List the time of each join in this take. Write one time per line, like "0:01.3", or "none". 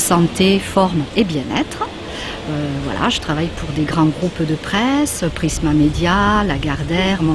none